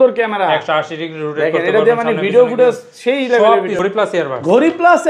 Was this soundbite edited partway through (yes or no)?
yes